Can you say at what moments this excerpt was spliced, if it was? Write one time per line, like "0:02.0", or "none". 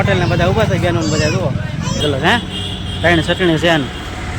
0:02.0

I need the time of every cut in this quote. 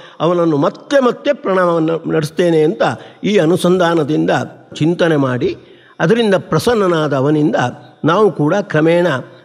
0:04.7

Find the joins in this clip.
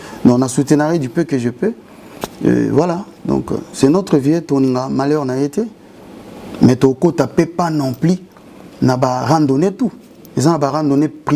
none

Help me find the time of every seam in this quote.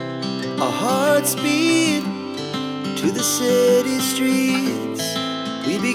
none

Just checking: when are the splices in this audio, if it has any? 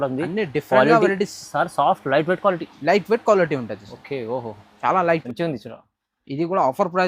0:05.2

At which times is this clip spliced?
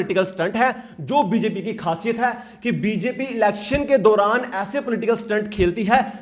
none

